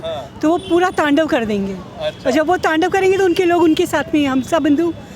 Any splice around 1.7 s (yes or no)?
no